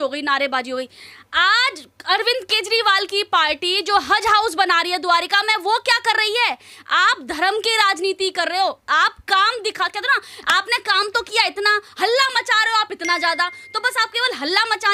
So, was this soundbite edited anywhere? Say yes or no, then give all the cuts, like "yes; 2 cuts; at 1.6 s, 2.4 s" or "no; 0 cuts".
no; 0 cuts